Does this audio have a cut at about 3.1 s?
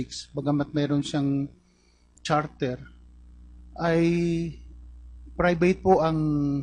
no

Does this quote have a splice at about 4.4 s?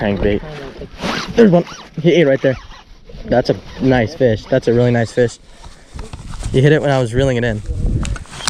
no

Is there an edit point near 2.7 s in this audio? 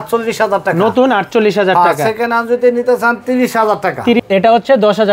no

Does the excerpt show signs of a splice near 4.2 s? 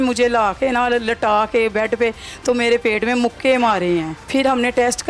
yes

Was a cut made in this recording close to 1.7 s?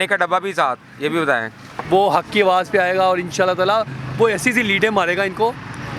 yes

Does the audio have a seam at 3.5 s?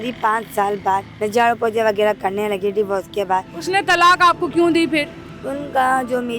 yes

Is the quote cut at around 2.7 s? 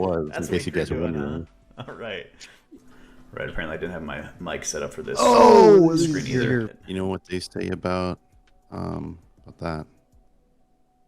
yes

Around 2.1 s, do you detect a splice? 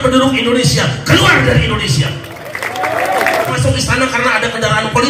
no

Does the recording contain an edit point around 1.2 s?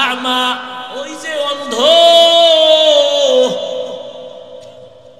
yes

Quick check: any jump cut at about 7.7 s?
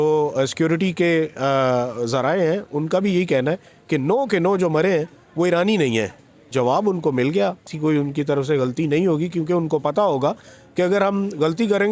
yes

